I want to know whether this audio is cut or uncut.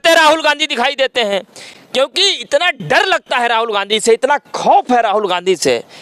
uncut